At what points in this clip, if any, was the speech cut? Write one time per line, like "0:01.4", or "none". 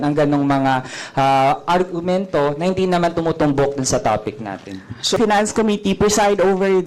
0:05.2